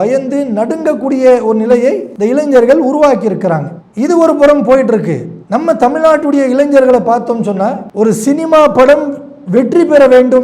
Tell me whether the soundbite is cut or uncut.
cut